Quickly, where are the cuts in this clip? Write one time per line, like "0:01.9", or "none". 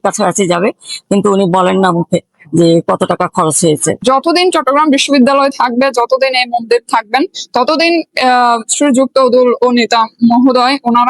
0:04.0